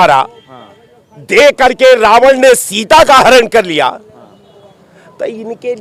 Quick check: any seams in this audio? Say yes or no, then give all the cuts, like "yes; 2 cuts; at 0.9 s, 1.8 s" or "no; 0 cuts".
no; 0 cuts